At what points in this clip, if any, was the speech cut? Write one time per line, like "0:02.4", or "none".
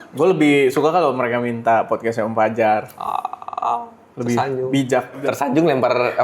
0:05.2